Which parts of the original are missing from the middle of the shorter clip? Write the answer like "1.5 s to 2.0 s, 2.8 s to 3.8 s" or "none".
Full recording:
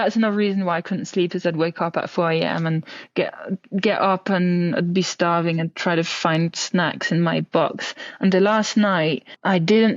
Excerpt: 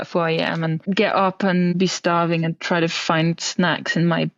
2.8 s to 3.7 s, 4.6 s to 4.9 s